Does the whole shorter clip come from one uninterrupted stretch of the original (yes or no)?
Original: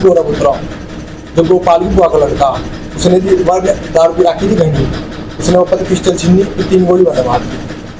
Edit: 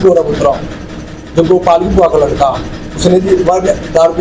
yes